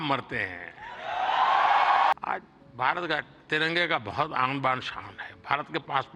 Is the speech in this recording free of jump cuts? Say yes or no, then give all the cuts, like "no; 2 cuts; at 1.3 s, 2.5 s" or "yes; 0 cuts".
no; 1 cut; at 2.1 s